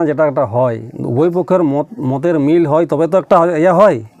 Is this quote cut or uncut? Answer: uncut